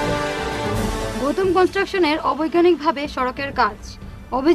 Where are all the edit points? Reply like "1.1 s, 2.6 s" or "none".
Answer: 0.9 s